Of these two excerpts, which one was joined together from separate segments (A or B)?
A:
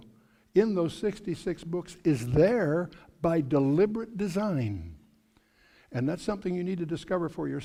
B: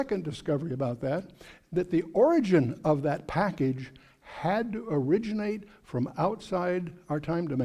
B